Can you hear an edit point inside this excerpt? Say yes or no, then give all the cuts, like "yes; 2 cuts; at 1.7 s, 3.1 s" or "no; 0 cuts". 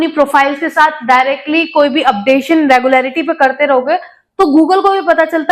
no; 0 cuts